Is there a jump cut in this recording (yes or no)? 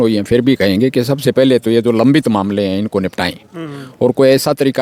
no